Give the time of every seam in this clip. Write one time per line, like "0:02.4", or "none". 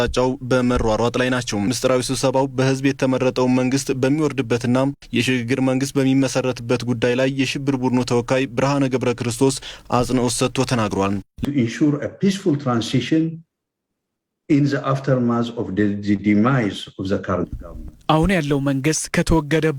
0:01.7
0:11.4